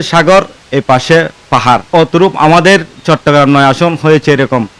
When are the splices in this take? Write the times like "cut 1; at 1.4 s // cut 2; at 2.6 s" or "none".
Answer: cut 1; at 1.9 s